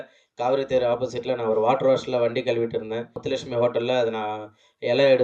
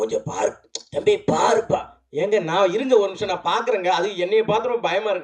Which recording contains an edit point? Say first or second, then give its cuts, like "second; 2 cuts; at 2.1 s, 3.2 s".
first; 1 cut; at 3.2 s